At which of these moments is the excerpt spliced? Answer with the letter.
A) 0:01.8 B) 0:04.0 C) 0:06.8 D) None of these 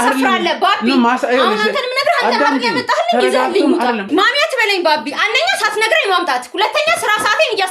B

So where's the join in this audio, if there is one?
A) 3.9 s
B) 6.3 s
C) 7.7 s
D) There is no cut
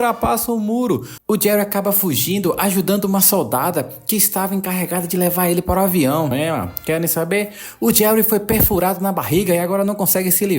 B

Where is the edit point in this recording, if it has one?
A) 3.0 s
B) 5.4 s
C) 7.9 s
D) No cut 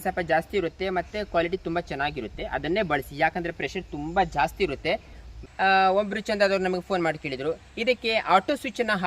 B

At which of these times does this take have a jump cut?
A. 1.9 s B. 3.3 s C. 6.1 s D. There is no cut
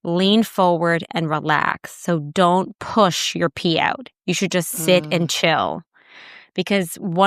D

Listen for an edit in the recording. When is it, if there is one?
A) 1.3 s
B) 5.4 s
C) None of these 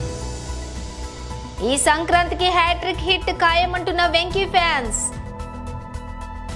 A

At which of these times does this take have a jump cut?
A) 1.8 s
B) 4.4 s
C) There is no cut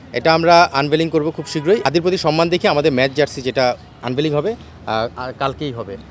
A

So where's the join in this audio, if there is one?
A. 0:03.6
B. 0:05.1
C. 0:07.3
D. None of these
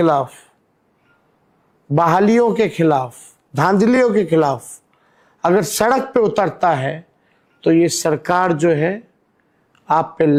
D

